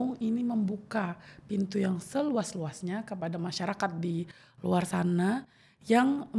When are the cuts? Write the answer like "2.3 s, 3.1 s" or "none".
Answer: none